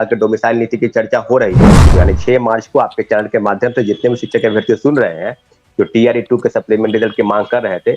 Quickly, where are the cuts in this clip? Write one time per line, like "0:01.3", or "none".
0:01.9